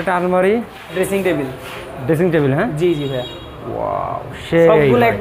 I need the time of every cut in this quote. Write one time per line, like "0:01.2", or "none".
0:00.9